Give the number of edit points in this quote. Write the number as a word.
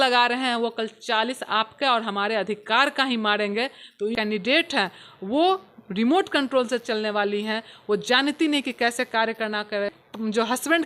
two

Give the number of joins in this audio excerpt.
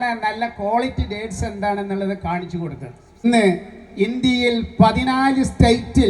one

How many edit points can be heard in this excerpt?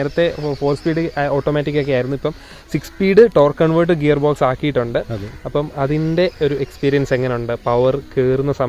zero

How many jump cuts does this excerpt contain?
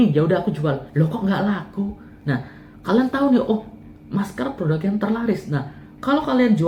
one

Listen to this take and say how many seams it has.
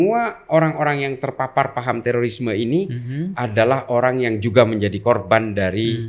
zero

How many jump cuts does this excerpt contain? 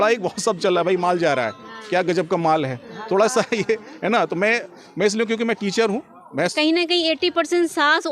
one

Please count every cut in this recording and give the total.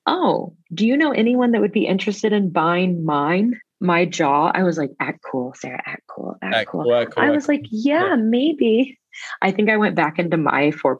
one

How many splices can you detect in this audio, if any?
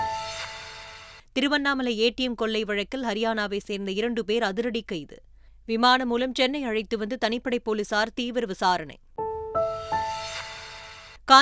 one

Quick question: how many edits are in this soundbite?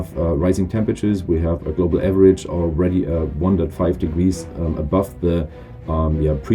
zero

